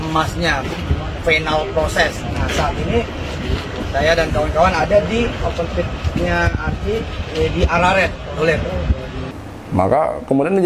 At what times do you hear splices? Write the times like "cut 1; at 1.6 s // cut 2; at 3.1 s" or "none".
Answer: cut 1; at 9.3 s